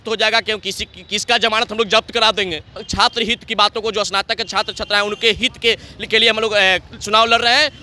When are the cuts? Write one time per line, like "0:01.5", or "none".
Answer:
0:02.8